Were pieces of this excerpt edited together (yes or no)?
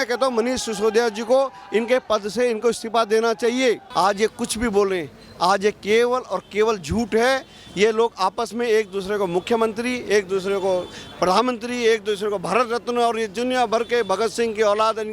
yes